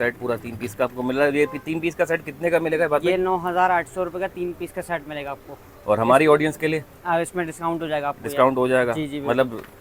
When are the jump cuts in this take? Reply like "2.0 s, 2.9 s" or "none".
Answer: none

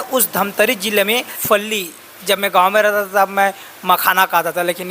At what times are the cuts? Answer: 1.3 s

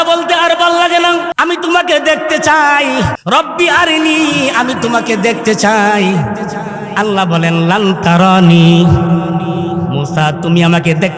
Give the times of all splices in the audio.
1.3 s, 3.2 s

